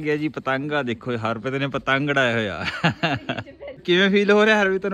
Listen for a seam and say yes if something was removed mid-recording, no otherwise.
yes